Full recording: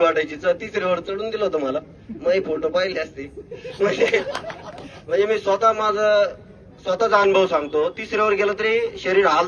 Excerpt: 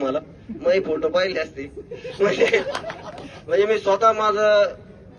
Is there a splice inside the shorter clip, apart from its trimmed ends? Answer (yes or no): no